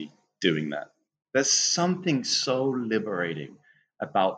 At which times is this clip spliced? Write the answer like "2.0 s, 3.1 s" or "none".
none